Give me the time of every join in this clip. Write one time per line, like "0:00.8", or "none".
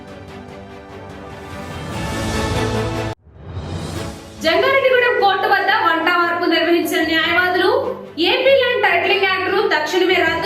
0:04.2